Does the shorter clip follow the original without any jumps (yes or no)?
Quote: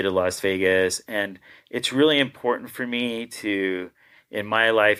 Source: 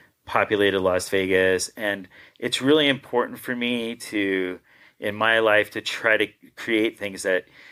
yes